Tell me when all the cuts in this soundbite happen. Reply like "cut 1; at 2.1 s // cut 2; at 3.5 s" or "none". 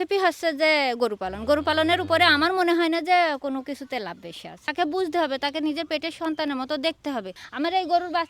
cut 1; at 4.7 s // cut 2; at 7.4 s